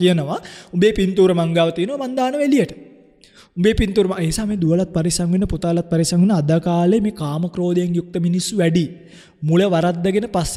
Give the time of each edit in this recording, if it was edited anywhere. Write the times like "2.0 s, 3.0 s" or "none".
none